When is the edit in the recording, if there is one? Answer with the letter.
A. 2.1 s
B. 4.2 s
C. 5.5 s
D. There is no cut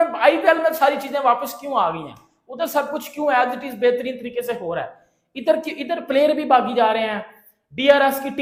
D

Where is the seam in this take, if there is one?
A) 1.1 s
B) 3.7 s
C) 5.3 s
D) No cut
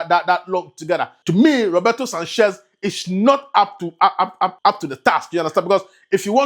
A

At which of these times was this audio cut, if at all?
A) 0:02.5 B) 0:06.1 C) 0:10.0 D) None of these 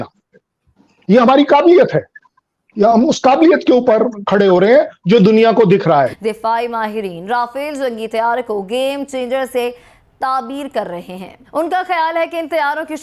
B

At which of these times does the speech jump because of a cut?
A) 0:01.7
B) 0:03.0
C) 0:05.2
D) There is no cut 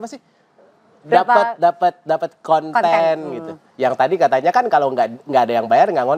D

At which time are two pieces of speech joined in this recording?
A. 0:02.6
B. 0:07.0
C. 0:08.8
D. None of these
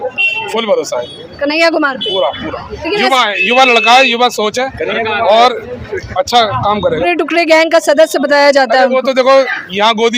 B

